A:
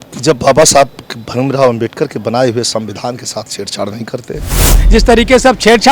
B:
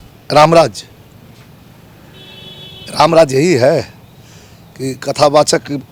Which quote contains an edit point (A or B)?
A